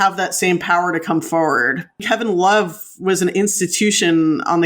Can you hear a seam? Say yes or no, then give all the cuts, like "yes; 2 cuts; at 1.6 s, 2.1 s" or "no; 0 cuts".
yes; 1 cut; at 2.0 s